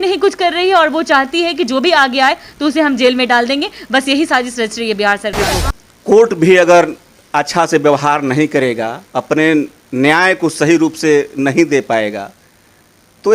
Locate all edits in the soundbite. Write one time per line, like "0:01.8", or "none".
0:05.4